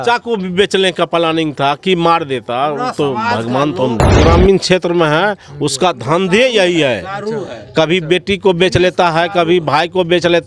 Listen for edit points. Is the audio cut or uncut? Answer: cut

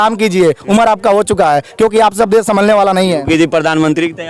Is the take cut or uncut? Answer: uncut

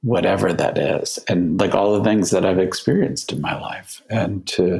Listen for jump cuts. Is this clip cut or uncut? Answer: uncut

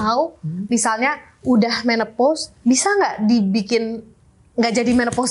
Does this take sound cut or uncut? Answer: cut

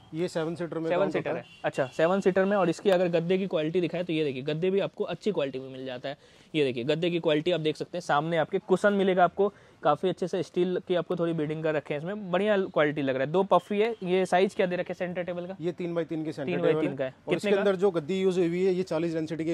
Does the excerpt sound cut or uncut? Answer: uncut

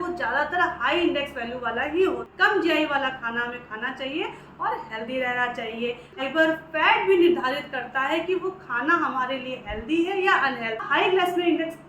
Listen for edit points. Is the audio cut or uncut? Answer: cut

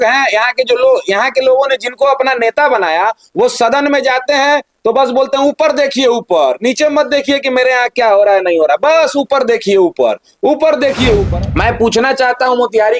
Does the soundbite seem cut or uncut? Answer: cut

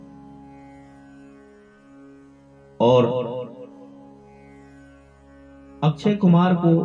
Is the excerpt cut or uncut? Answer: uncut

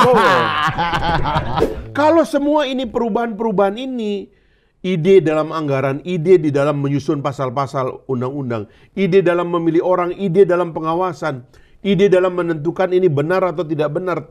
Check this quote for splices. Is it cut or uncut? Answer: cut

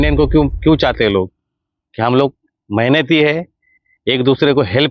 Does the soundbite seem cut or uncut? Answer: uncut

